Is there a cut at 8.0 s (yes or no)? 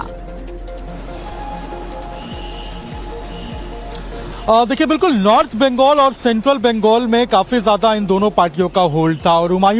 yes